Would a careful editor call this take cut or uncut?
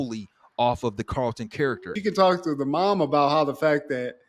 cut